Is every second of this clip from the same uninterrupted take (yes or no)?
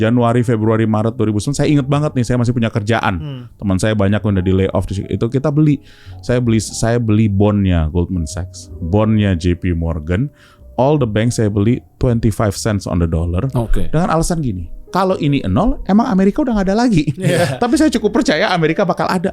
yes